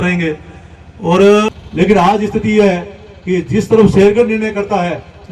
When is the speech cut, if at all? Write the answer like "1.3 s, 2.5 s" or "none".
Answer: 1.6 s